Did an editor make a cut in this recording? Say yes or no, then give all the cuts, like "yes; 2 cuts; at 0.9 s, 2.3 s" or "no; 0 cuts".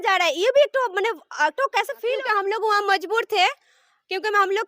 yes; 1 cut; at 2.0 s